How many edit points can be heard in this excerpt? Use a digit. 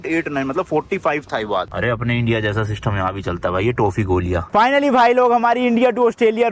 2